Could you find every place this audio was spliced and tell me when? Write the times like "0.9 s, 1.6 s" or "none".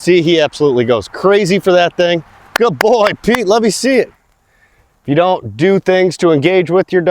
4.2 s